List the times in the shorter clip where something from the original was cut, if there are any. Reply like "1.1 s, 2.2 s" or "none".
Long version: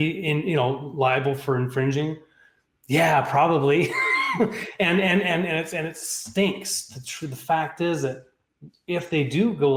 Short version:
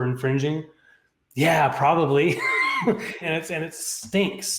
3.2 s